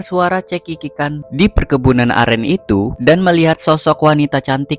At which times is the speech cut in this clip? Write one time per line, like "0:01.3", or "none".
0:01.2
0:02.9